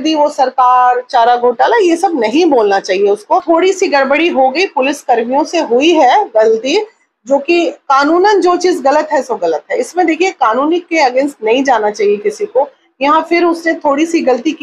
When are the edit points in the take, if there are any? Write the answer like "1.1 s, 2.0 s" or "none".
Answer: 3.4 s